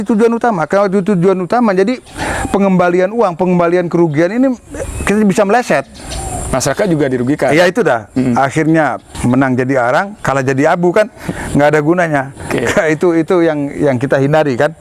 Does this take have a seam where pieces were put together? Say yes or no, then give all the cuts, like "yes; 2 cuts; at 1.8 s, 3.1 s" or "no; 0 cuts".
yes; 1 cut; at 9.1 s